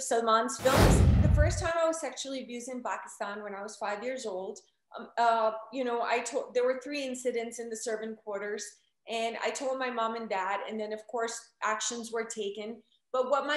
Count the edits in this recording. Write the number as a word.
one